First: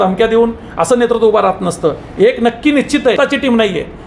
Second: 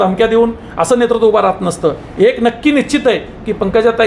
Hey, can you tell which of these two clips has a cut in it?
first; 1 cut; at 3.2 s

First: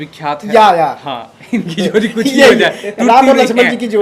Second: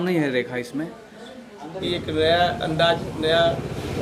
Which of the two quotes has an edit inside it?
second; 1 cut; at 1.7 s

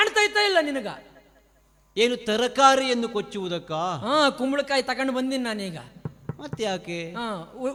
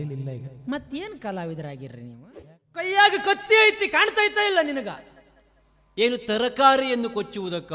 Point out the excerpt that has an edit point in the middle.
second; 1 cut; at 2.3 s

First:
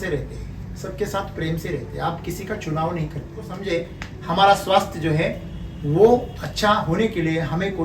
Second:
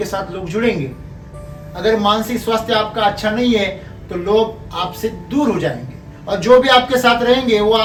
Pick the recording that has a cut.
first; 1 cut; at 3.6 s

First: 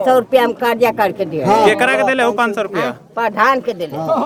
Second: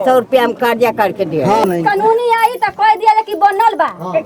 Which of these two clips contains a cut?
second; 1 cut; at 1.6 s

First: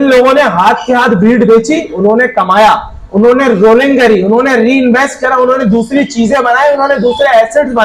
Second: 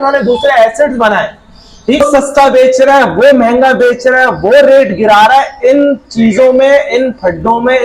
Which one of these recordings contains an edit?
second; 1 cut; at 2.0 s

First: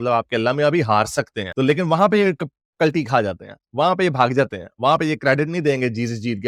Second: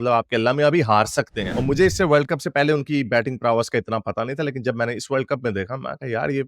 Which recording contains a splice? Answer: second; 1 cut; at 1.5 s

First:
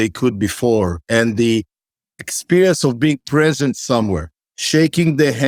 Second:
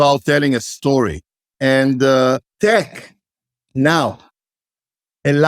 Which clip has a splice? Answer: second; 2 cuts; at 1.5 s, 2.5 s

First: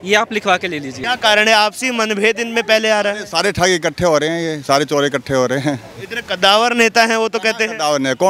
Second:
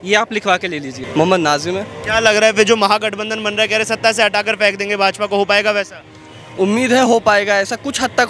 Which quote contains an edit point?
first; 1 cut; at 0.9 s

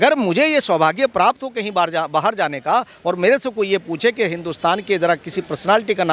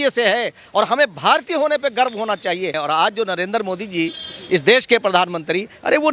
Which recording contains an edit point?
second; 1 cut; at 2.8 s

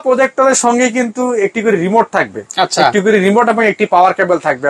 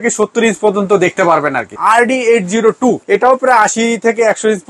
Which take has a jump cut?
second; 2 cuts; at 1.7 s, 3.0 s

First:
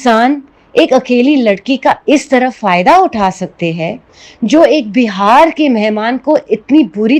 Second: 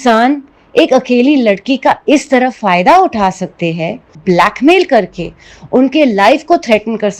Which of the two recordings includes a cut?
second; 1 cut; at 4.2 s

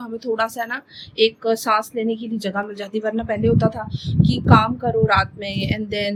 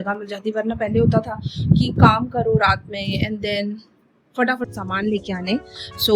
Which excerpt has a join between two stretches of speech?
second; 1 cut; at 4.7 s

